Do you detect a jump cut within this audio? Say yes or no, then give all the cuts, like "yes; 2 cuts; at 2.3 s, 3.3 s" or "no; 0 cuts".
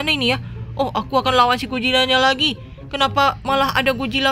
no; 0 cuts